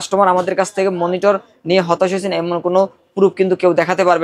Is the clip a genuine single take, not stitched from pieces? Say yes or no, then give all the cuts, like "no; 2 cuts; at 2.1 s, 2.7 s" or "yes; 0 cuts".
yes; 0 cuts